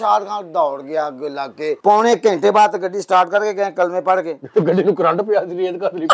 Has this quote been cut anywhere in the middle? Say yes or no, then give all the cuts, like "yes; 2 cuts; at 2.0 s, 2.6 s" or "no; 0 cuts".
yes; 1 cut; at 1.8 s